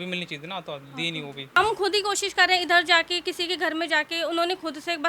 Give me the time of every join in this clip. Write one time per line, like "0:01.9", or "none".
0:01.6